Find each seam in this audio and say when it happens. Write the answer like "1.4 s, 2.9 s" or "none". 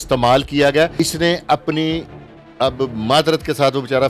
0.9 s